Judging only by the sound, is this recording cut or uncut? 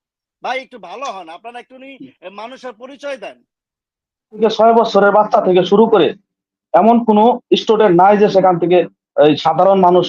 cut